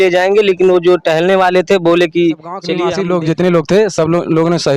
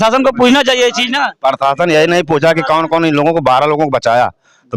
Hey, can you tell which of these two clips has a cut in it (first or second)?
first